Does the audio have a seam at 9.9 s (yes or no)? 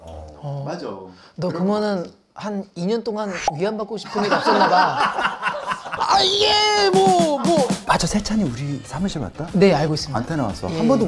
no